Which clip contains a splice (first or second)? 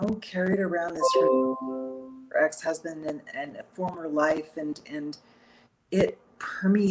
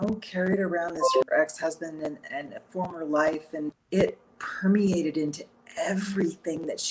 second